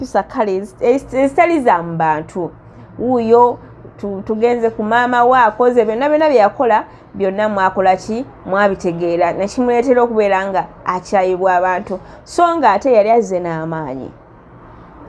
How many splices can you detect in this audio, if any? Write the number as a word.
zero